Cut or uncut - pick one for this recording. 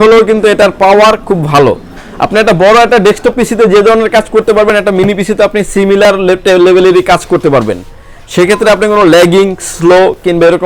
uncut